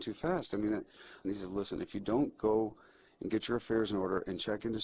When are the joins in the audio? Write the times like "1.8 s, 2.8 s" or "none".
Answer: 1.2 s